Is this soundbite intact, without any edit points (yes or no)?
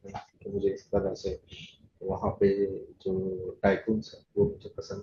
yes